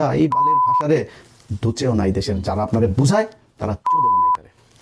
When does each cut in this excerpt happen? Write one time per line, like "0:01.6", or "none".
none